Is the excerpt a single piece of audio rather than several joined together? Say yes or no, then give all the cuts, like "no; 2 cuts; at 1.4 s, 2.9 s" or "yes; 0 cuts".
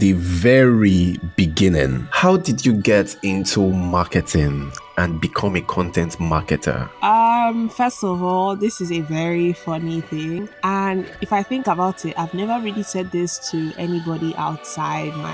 no; 3 cuts; at 2.0 s, 6.9 s, 11.2 s